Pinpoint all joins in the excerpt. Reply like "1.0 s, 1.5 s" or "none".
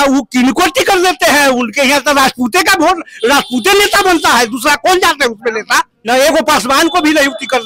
6.1 s